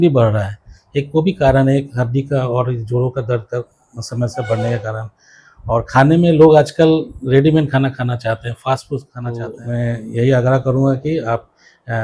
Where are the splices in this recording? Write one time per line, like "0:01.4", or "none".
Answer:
0:09.5